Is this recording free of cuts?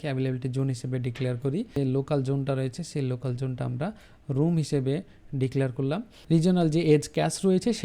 no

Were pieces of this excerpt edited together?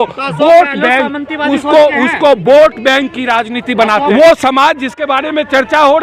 yes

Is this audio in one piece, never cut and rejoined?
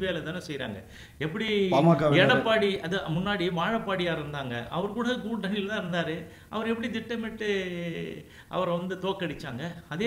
yes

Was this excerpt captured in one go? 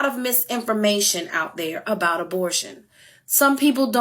no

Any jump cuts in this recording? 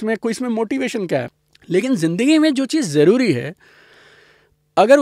no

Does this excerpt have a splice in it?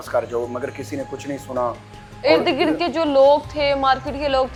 no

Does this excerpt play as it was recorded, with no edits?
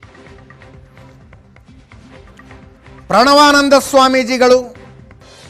yes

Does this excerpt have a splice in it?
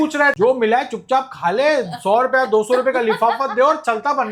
no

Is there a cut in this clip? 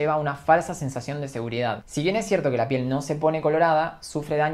yes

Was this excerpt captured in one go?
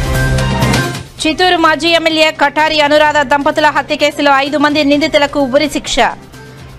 no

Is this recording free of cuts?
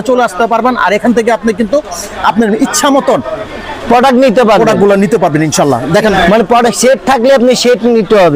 yes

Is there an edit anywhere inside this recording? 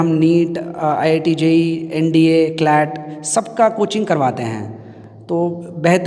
no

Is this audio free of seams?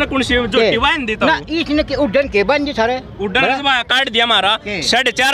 yes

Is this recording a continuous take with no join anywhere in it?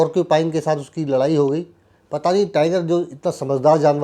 yes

